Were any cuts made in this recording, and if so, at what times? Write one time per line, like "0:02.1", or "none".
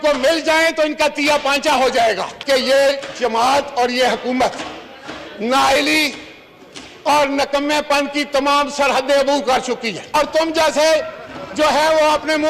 0:02.3
0:10.0